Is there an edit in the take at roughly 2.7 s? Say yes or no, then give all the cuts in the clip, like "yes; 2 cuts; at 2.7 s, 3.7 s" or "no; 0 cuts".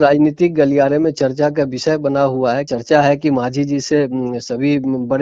yes; 1 cut; at 2.7 s